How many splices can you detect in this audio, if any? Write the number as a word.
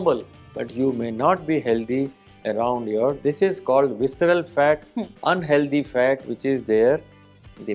zero